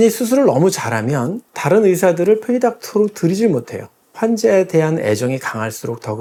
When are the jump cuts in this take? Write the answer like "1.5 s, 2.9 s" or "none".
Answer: none